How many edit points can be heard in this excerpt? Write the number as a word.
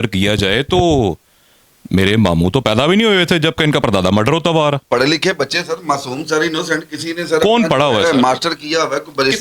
one